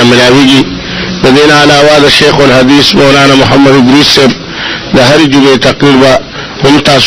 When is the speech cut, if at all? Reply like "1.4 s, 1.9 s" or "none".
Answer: none